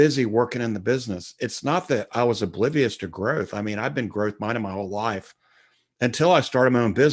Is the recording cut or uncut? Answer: uncut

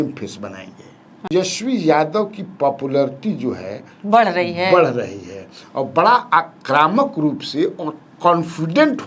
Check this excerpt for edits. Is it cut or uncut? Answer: cut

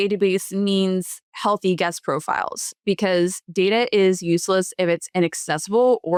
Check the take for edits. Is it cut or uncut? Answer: uncut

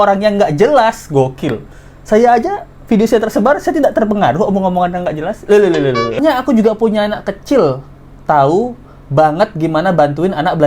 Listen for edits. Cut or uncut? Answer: cut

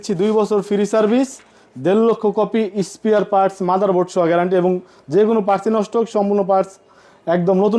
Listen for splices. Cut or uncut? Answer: uncut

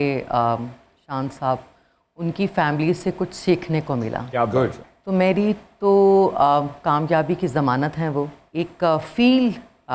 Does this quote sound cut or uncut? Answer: cut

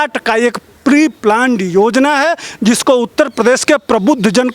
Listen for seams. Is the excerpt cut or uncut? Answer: uncut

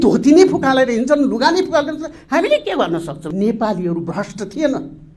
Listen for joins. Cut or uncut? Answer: cut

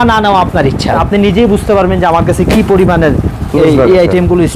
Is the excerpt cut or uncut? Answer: cut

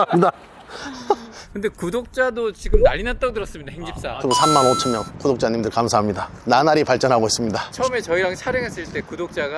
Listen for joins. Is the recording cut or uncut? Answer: uncut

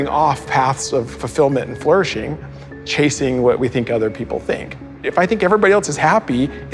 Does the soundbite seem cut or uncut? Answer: cut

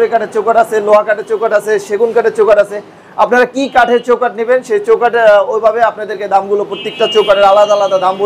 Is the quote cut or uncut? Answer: uncut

